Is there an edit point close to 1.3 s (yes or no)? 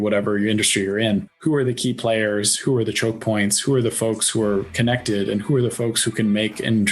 yes